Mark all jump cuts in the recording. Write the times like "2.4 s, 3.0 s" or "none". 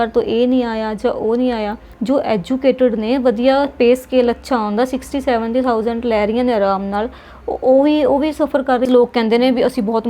1.9 s, 8.9 s